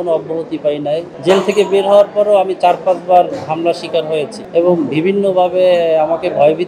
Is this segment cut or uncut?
cut